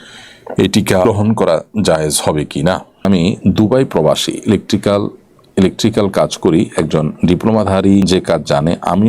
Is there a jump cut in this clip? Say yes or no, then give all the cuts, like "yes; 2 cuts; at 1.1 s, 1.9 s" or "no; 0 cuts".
yes; 3 cuts; at 1.0 s, 3.0 s, 8.1 s